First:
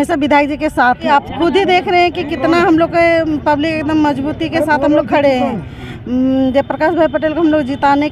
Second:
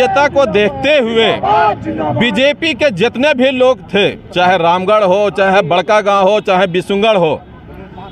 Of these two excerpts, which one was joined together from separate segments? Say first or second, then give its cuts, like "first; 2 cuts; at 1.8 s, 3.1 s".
first; 1 cut; at 1.1 s